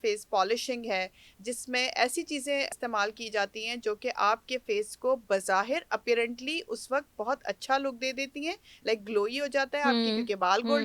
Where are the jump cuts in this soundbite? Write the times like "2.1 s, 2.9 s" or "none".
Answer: 2.7 s